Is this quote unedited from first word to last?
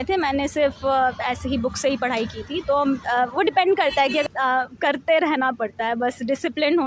no; 1 cut; at 4.3 s

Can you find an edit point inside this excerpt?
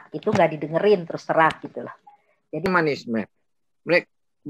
yes; 1 cut; at 2.7 s

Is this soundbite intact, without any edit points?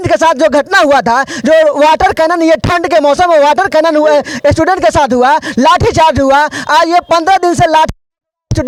yes; 0 cuts

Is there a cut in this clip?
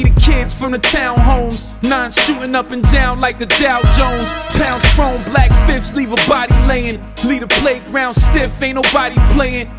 no; 0 cuts

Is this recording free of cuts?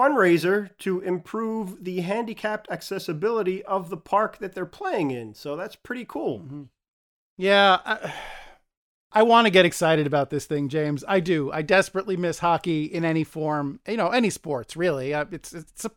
yes; 0 cuts

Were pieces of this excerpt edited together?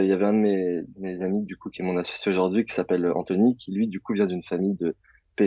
no; 0 cuts

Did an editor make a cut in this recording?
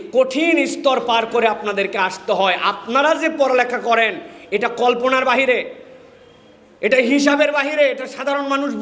no; 0 cuts

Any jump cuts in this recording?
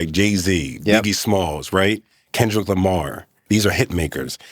yes; 1 cut; at 3.4 s

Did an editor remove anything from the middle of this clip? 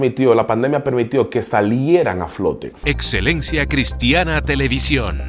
yes; 1 cut; at 2.8 s

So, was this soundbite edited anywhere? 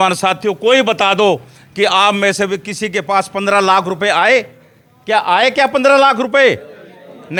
no; 0 cuts

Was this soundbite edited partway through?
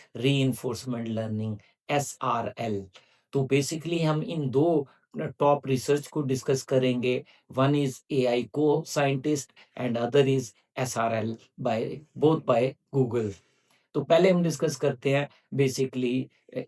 no; 0 cuts

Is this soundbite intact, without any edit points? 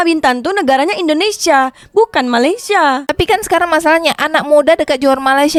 yes; 0 cuts

